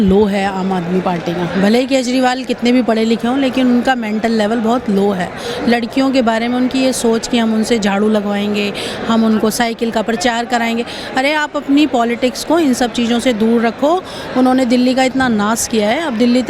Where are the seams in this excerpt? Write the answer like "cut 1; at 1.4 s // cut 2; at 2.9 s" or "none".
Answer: none